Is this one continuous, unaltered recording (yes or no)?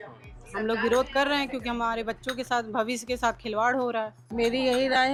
yes